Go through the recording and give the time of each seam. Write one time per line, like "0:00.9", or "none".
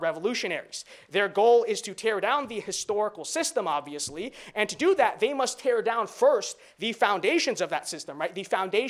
none